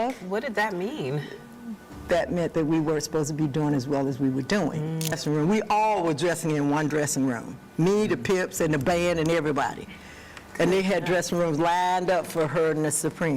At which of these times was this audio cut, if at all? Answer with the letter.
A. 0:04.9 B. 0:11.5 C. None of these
A